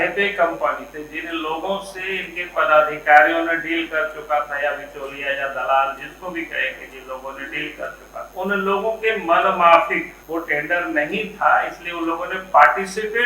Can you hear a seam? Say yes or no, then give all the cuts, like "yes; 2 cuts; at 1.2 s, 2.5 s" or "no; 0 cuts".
yes; 2 cuts; at 8.3 s, 10.2 s